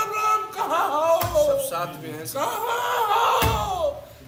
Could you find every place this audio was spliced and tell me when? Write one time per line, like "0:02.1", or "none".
none